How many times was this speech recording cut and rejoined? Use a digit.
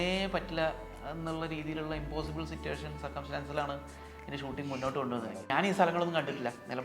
1